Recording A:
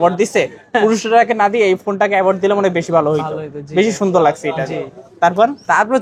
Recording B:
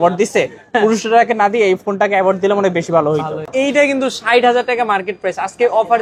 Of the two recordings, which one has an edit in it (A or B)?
B